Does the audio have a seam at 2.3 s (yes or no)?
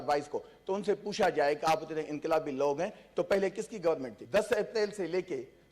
no